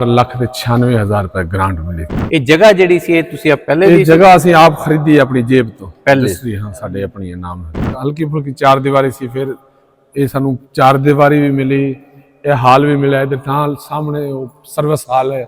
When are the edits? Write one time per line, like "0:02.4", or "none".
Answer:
0:02.1
0:07.8